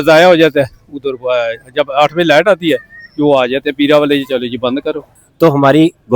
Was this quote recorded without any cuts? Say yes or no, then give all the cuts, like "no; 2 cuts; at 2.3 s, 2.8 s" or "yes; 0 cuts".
no; 1 cut; at 5.2 s